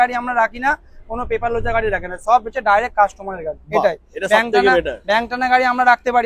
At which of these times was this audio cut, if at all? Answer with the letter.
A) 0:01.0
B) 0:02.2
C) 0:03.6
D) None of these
D